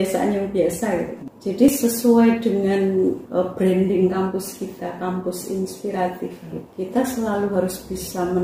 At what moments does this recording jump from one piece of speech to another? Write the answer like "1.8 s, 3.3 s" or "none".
1.7 s, 3.2 s, 6.6 s

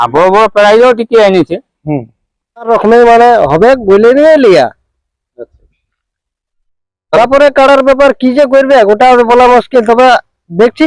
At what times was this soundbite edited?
2.7 s

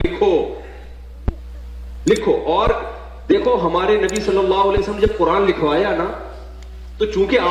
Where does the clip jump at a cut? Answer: none

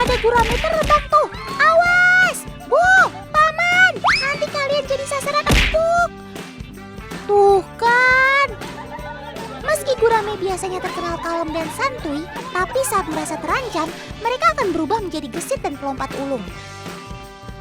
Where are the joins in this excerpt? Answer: 9.3 s, 16.6 s

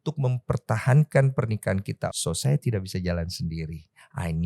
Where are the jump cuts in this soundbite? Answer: 2.2 s

